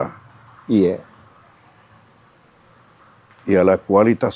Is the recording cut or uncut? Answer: uncut